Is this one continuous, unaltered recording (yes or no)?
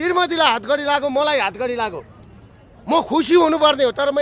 yes